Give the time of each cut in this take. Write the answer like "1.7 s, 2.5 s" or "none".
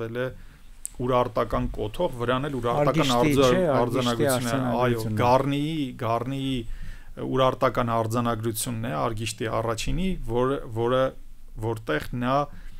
none